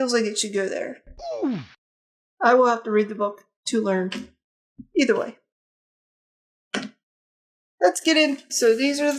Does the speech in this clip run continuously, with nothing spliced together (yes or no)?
yes